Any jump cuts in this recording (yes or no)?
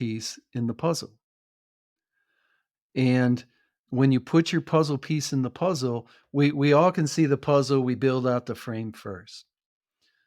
yes